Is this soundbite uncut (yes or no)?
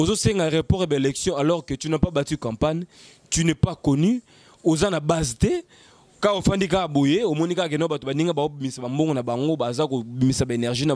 yes